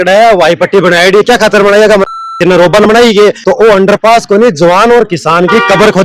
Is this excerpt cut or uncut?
cut